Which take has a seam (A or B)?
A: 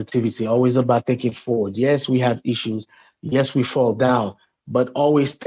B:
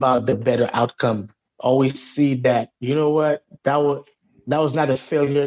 B